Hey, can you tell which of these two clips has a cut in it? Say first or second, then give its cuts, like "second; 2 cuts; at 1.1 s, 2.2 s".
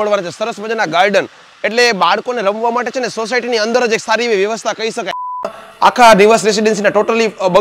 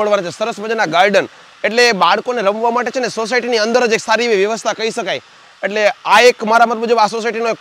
first; 1 cut; at 5.6 s